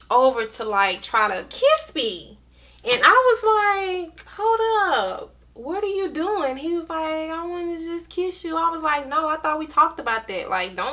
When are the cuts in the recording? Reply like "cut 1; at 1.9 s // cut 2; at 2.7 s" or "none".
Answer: none